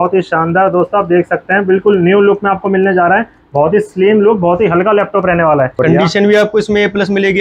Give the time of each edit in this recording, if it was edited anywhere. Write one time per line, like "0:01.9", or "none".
0:05.7